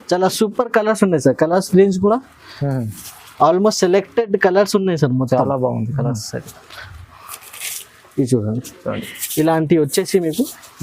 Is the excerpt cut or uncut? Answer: uncut